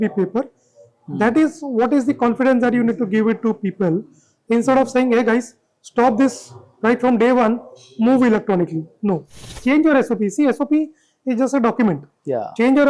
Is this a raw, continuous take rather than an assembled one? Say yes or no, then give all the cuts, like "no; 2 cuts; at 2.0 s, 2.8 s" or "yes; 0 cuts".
no; 1 cut; at 9.5 s